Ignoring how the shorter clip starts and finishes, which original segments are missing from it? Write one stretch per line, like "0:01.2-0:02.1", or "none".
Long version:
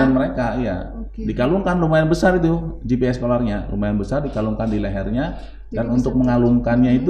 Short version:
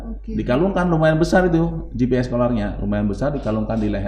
none